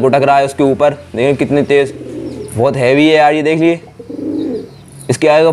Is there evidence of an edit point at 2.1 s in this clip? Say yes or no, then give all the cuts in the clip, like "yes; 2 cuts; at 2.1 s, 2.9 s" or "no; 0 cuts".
no; 0 cuts